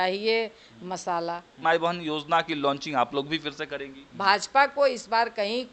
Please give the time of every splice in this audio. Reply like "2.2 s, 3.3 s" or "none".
1.5 s, 4.0 s